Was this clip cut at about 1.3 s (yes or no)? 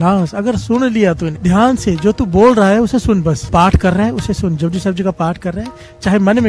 yes